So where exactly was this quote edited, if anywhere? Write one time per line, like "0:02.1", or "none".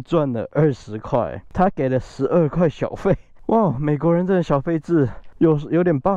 0:01.4
0:03.3
0:05.2